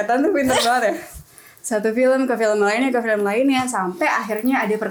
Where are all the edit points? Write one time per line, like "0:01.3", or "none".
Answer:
none